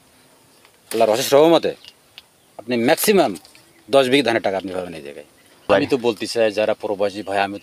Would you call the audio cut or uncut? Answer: cut